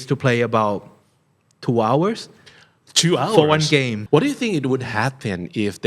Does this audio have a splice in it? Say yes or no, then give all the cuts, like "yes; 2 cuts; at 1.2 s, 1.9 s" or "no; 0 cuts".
yes; 1 cut; at 4.0 s